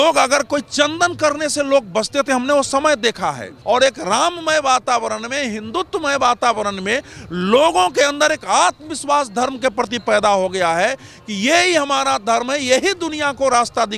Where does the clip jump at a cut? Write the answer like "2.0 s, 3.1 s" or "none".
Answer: 3.5 s